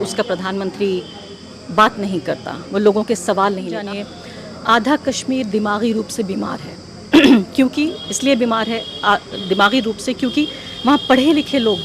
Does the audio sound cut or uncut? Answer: cut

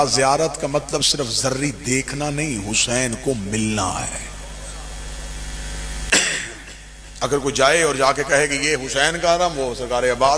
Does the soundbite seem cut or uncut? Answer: uncut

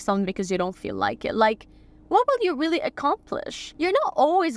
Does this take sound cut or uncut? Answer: cut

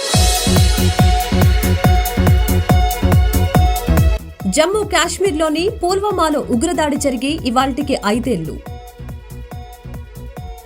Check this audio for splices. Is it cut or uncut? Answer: cut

